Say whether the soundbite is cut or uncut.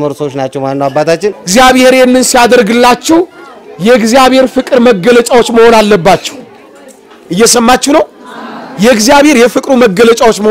cut